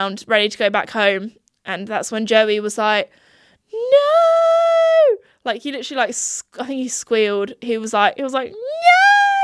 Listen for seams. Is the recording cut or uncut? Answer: uncut